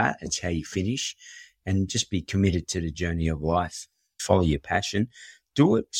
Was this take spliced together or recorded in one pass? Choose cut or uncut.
cut